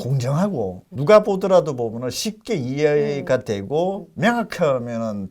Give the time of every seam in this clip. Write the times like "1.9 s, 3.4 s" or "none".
0.9 s